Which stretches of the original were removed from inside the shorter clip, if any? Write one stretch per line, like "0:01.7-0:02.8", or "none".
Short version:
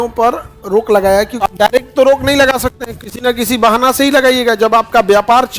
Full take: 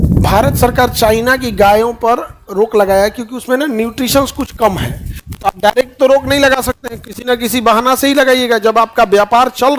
0:03.2-0:05.4